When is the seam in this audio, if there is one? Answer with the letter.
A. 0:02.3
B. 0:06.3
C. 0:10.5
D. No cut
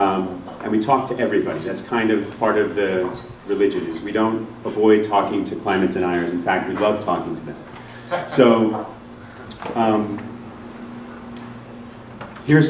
A